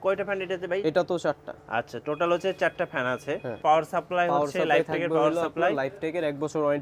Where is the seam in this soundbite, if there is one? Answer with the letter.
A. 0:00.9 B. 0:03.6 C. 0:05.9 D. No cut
B